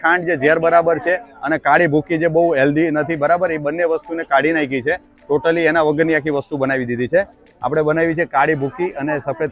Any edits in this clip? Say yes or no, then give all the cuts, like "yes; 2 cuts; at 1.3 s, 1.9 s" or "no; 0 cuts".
no; 0 cuts